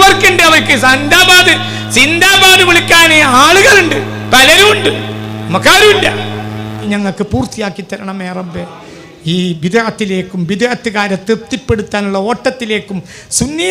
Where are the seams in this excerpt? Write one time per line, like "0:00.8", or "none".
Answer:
0:06.9